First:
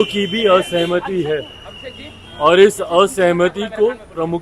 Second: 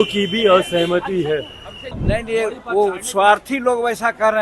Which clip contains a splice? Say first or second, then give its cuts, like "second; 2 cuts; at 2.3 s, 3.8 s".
second; 1 cut; at 2.0 s